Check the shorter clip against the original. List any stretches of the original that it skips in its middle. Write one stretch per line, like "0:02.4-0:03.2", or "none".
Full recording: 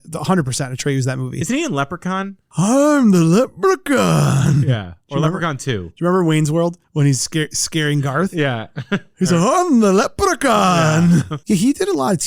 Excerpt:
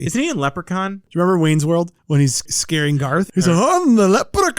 0:02.4-0:05.9
0:07.6-0:08.6